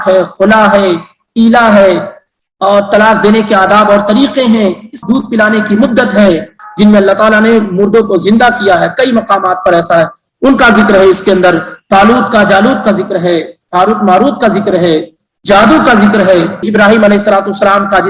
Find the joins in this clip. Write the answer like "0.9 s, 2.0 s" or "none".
4.9 s, 6.6 s, 16.6 s